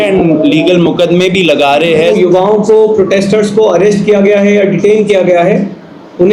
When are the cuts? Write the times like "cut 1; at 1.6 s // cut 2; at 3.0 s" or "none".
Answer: cut 1; at 2.1 s